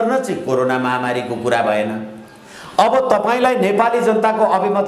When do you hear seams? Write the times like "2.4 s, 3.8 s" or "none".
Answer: none